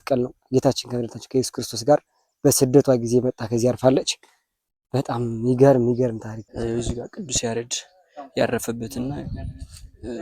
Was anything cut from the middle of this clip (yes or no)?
yes